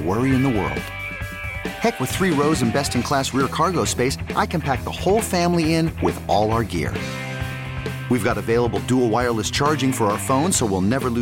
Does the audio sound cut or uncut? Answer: uncut